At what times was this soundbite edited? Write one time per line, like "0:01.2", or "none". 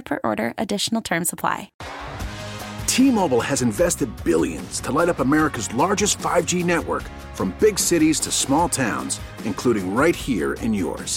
0:01.8